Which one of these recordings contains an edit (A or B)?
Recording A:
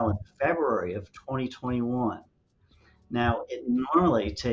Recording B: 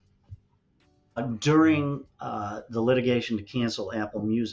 B